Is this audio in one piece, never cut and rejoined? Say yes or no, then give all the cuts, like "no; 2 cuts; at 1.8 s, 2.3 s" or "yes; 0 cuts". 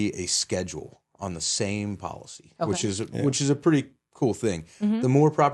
yes; 0 cuts